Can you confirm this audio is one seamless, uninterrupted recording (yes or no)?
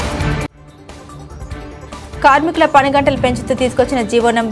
yes